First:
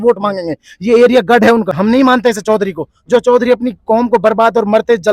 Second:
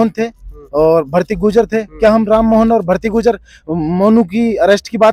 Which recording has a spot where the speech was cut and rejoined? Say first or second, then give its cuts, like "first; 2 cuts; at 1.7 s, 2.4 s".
first; 1 cut; at 1.7 s